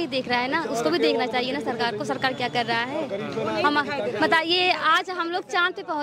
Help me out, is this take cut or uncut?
uncut